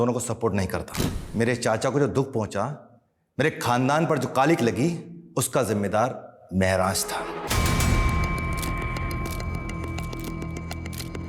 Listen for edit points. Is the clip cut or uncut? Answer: cut